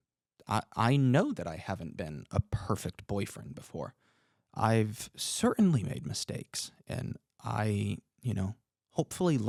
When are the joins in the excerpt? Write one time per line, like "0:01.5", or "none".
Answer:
none